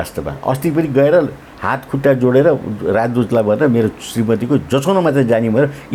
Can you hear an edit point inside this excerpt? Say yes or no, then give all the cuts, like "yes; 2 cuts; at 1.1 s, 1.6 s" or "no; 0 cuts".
no; 0 cuts